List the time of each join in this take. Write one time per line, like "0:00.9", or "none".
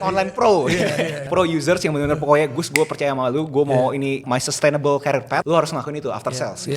0:01.2
0:04.2
0:05.4